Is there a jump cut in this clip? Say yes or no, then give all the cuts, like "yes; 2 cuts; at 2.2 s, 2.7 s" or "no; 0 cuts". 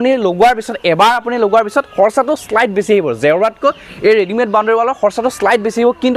no; 0 cuts